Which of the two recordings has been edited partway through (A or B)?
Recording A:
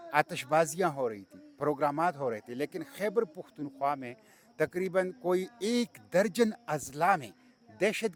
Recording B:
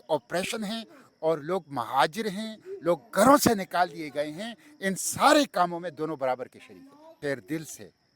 B